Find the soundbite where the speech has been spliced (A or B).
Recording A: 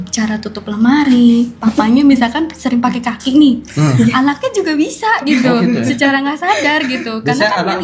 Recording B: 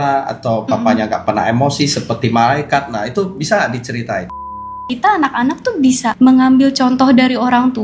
B